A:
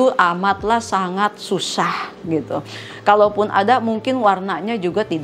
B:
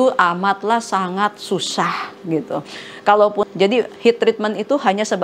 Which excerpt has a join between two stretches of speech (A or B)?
B